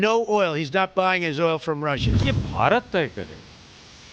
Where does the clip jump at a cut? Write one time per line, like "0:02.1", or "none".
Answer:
0:02.1

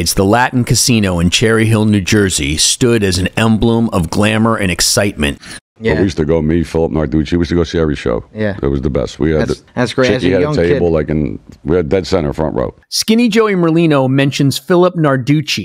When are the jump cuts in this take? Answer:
0:05.4

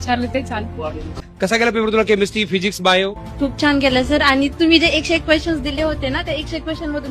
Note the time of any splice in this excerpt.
0:01.2

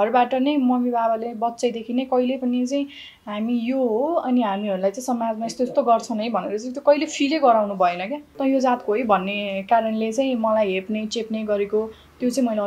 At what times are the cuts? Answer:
0:08.2

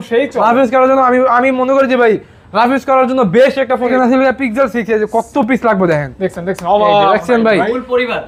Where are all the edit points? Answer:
0:03.9

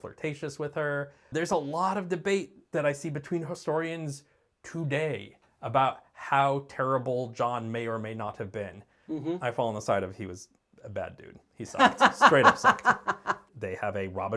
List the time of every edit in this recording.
0:01.3
0:13.4

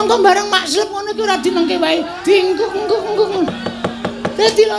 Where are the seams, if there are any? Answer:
0:03.6

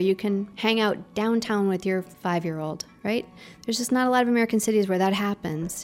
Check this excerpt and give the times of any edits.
none

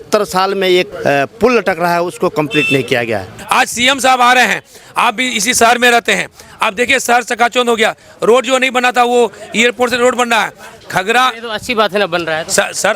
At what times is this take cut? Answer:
0:00.9
0:03.3

